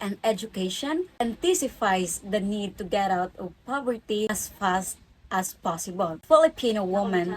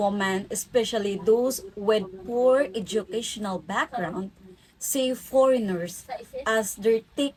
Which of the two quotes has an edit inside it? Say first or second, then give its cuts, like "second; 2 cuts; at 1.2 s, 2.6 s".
first; 3 cuts; at 1.1 s, 4.3 s, 6.2 s